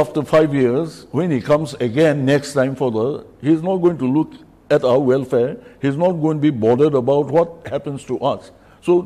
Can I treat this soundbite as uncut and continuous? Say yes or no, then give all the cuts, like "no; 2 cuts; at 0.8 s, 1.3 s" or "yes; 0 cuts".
yes; 0 cuts